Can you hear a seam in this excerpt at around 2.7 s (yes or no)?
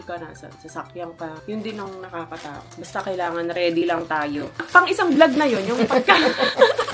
yes